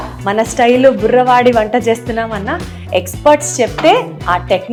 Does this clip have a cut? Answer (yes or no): no